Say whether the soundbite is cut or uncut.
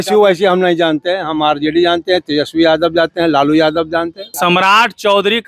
cut